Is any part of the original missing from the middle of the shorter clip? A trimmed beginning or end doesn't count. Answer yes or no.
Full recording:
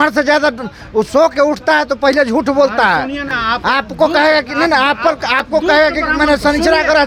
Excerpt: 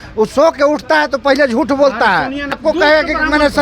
yes